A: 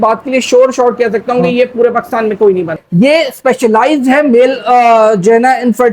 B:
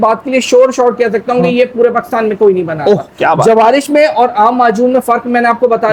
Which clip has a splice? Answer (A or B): A